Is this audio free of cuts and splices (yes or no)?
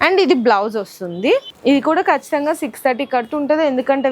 no